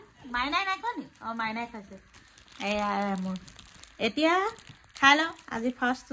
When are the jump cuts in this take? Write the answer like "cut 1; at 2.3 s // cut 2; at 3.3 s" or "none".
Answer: none